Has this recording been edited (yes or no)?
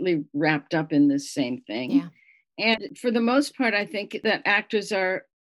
yes